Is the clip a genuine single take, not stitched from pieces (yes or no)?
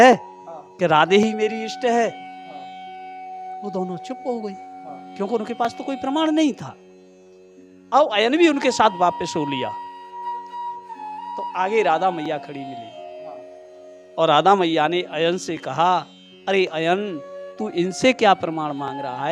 yes